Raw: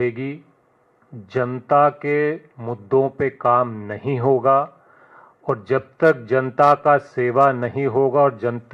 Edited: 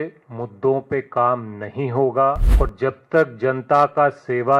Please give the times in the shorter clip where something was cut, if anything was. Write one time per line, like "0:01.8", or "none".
0:02.5